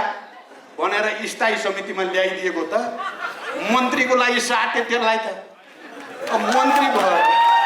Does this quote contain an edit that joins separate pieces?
no; 0 cuts

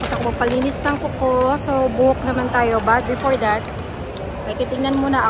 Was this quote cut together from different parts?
no; 0 cuts

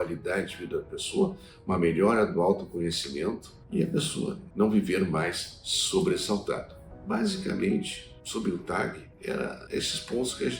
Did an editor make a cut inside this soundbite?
no; 0 cuts

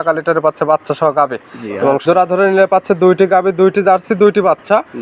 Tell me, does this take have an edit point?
yes; 1 cut; at 2.0 s

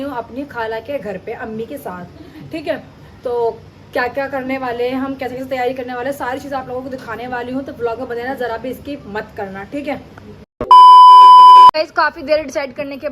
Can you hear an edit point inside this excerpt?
no; 0 cuts

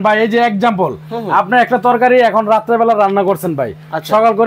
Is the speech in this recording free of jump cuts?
yes; 0 cuts

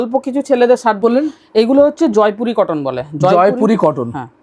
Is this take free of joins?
no; 1 cut; at 1.0 s

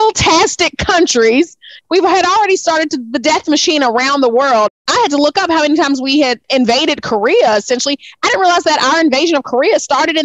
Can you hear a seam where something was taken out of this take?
yes; 3 cuts; at 1.8 s, 4.8 s, 6.4 s

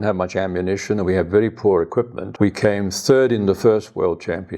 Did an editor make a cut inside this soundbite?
yes; 1 cut; at 2.2 s

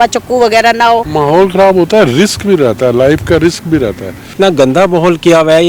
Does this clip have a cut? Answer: yes; 2 cuts; at 1.1 s, 4.3 s

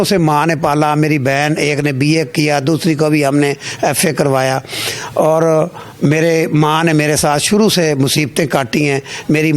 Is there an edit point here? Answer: no; 0 cuts

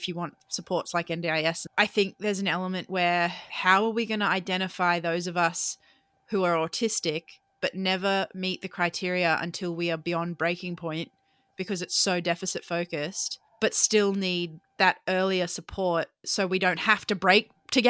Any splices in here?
no; 0 cuts

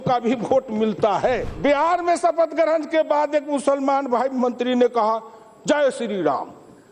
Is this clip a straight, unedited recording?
no; 1 cut; at 1.5 s

